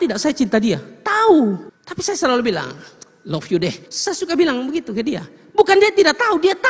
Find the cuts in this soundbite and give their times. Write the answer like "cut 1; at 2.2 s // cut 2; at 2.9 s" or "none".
cut 1; at 1.6 s // cut 2; at 3.9 s